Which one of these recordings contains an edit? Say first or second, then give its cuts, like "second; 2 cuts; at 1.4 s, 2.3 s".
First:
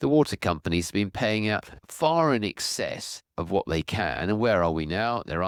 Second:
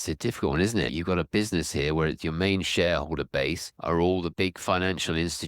second; 3 cuts; at 0.9 s, 3.7 s, 4.3 s